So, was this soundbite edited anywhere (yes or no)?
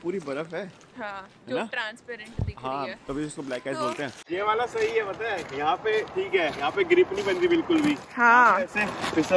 yes